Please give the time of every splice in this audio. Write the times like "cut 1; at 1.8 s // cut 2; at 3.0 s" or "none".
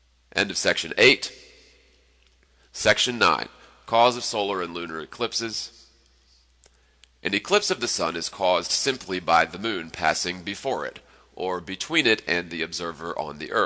none